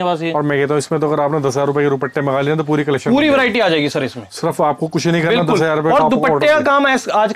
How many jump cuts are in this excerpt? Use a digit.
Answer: 0